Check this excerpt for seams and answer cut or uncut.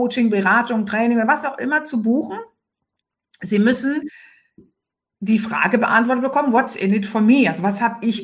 uncut